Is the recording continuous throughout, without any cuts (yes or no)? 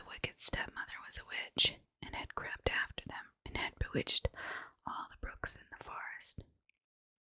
no